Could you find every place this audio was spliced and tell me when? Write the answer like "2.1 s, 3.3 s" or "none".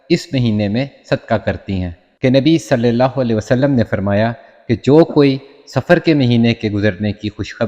2.0 s